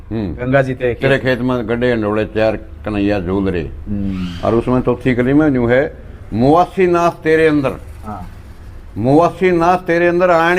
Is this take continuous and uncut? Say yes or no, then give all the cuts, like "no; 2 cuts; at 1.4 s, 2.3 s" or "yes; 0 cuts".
yes; 0 cuts